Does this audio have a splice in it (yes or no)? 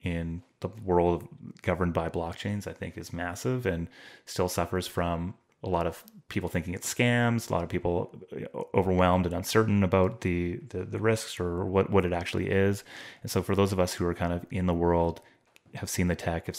yes